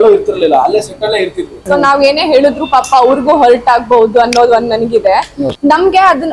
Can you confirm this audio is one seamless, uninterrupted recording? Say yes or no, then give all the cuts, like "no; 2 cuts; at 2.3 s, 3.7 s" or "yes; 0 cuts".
no; 2 cuts; at 1.6 s, 5.4 s